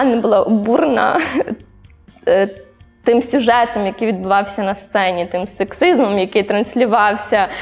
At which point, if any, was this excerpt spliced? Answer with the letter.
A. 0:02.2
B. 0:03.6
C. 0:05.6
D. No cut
D